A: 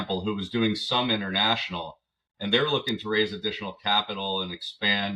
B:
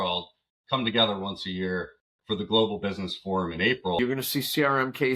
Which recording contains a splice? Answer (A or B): B